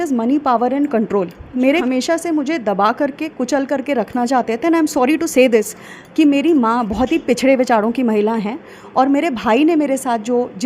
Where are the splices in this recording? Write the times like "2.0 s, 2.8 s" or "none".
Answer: 1.8 s

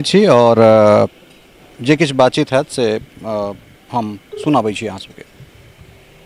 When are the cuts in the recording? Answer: none

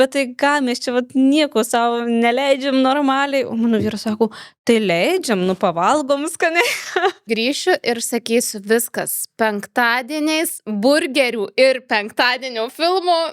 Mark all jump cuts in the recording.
7.3 s

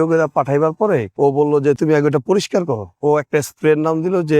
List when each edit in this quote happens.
1.8 s, 2.9 s

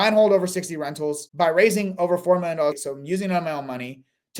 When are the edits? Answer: 1.2 s, 2.8 s

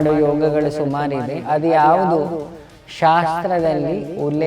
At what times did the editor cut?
1.3 s

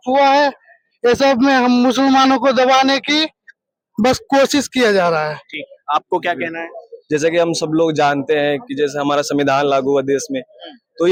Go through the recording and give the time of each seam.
none

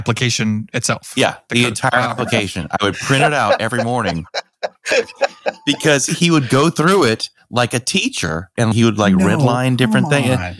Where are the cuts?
8.7 s

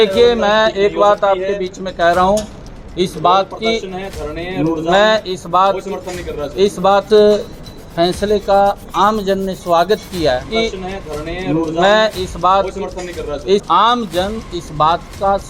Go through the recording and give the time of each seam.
7.1 s, 10.5 s, 13.6 s

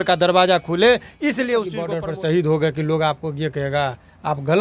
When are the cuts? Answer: 1.9 s

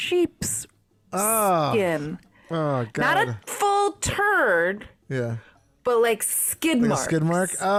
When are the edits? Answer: none

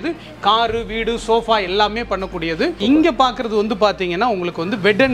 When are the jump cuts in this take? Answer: 2.8 s

